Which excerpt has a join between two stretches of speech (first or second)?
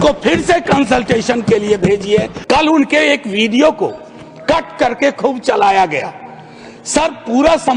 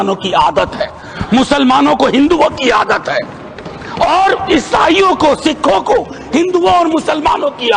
first